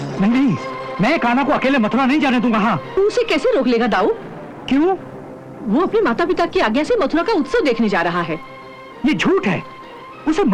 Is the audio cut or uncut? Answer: uncut